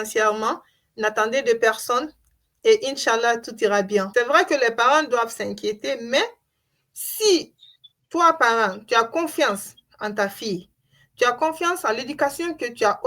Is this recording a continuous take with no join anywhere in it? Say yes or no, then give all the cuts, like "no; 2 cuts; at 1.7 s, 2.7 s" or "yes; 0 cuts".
no; 1 cut; at 4.1 s